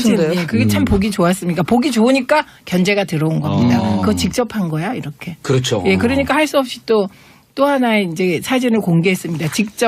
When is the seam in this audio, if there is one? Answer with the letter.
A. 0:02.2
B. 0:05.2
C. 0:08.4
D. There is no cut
B